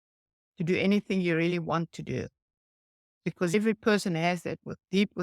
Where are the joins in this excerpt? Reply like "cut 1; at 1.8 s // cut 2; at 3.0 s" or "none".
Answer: cut 1; at 3.5 s